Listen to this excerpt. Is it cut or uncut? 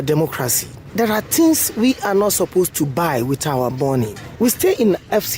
uncut